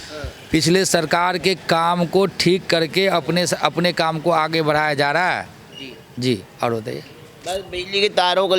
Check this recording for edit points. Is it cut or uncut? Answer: uncut